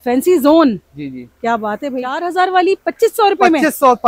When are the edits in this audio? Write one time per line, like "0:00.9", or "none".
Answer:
0:02.2